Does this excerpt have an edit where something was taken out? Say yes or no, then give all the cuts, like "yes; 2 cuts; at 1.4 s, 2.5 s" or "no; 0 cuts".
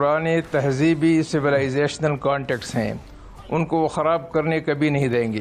no; 0 cuts